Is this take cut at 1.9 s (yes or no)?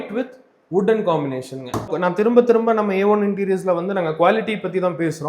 yes